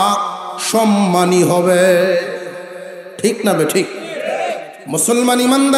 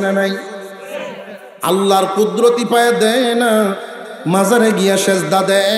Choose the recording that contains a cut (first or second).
first